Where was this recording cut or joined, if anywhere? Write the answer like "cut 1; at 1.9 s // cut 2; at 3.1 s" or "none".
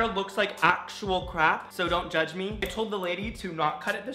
cut 1; at 2.6 s